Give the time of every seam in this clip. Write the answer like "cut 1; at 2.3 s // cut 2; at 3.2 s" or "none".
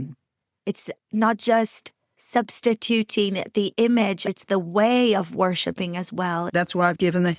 cut 1; at 4.3 s // cut 2; at 6.5 s